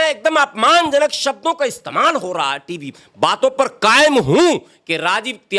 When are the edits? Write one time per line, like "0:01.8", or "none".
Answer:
0:02.9